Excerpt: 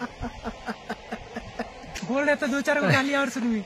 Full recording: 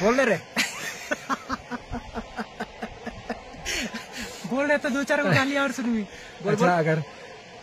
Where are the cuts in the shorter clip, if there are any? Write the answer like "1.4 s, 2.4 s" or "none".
2.1 s